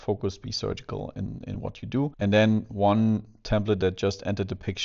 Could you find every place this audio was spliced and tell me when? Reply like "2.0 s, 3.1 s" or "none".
2.1 s